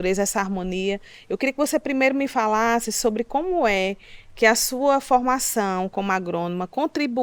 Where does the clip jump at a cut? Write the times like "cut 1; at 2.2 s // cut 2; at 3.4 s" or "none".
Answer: none